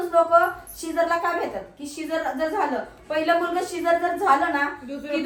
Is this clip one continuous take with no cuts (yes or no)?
yes